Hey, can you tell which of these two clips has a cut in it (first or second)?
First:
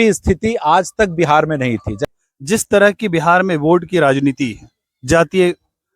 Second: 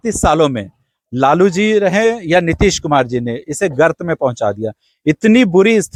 first